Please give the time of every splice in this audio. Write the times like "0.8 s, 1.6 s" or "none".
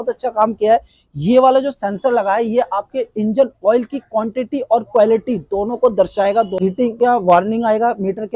none